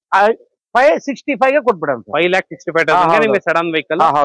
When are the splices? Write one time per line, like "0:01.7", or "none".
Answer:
none